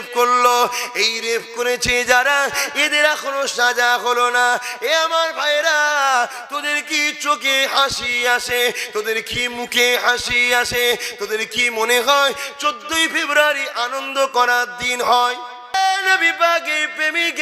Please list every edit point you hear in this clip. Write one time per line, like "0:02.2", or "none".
0:15.7